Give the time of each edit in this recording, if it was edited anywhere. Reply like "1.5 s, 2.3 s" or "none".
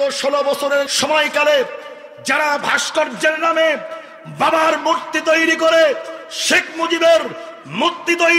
0.9 s